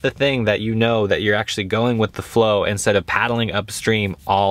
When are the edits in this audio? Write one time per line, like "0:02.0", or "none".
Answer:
none